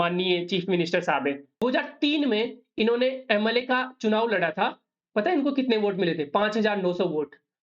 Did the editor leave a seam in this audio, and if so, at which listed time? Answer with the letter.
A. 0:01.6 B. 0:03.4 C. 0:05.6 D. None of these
A